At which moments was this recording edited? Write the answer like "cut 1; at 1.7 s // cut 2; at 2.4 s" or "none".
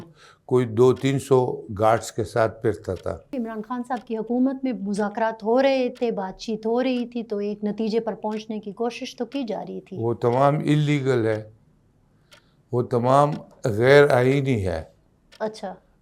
cut 1; at 3.4 s